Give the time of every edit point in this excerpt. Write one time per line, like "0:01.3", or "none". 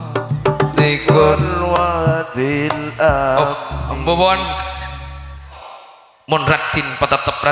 0:05.6